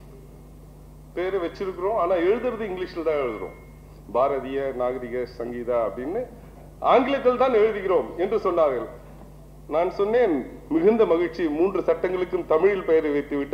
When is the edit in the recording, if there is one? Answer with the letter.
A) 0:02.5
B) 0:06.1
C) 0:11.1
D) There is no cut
D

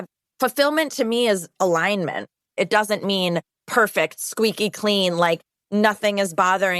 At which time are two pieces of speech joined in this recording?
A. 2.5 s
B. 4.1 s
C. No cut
A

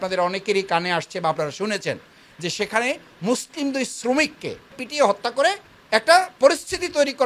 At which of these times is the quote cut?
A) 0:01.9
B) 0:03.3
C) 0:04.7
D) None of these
C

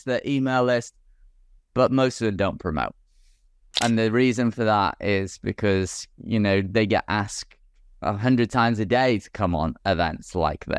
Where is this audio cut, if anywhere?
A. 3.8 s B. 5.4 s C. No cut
A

